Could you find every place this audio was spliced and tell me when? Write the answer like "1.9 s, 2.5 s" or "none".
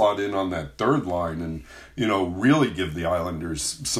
none